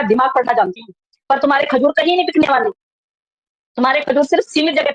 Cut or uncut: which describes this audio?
cut